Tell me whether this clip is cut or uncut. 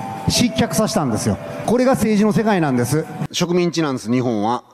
cut